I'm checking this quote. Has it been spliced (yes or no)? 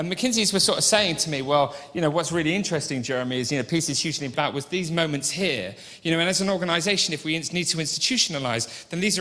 no